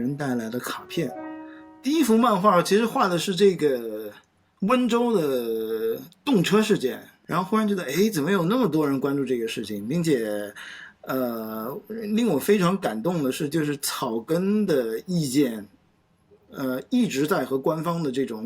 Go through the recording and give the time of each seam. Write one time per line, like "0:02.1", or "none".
0:01.1
0:07.1